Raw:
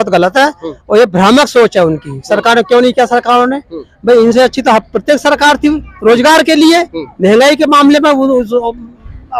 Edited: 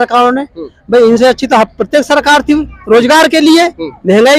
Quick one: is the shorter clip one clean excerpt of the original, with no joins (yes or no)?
yes